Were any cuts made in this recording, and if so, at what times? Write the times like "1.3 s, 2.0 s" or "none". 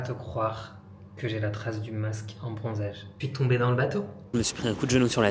3.2 s, 4.2 s